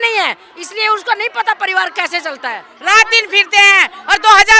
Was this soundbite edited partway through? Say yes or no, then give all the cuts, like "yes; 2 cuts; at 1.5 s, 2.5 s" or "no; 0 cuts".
yes; 1 cut; at 2.7 s